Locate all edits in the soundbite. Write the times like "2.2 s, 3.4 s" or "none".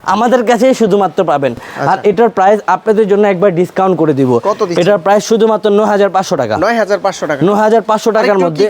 none